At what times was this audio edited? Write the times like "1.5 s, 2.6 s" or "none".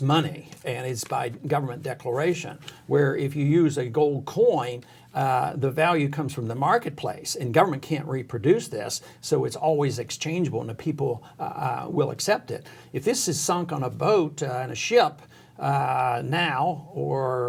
none